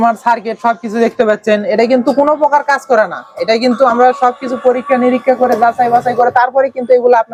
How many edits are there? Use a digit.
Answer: 0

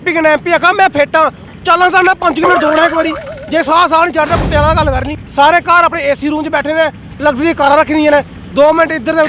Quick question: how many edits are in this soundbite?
1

